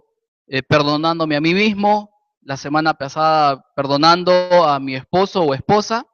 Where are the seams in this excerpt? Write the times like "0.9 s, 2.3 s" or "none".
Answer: none